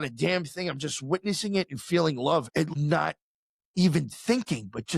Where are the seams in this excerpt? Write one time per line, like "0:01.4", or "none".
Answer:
0:02.8